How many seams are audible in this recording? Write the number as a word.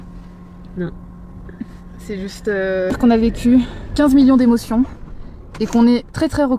one